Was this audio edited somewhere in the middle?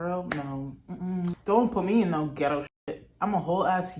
yes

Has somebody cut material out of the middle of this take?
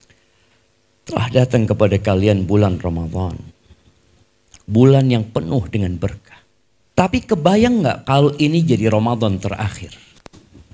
yes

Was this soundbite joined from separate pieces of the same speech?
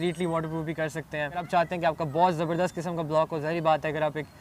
yes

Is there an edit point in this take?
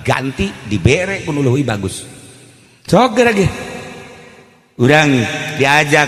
no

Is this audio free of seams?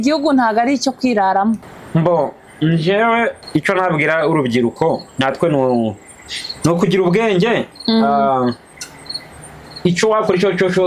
no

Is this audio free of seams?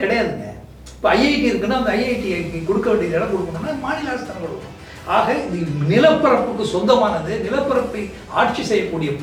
yes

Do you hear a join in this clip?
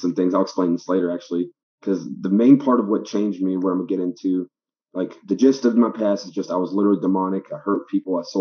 no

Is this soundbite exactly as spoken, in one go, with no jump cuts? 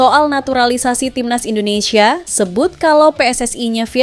yes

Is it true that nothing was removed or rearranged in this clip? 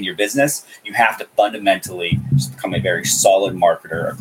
yes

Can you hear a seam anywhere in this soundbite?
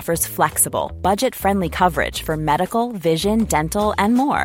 no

